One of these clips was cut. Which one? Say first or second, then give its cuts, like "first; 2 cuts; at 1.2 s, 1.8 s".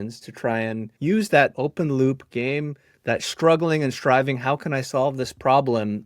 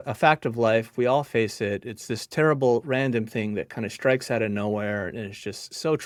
first; 2 cuts; at 0.9 s, 1.5 s